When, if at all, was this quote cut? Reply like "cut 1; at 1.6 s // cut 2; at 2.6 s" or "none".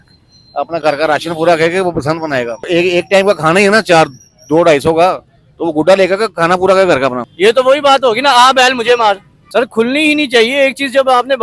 cut 1; at 2.6 s // cut 2; at 7.2 s // cut 3; at 9.3 s